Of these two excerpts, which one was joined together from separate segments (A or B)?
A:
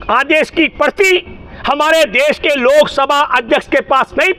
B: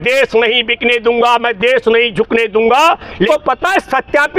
B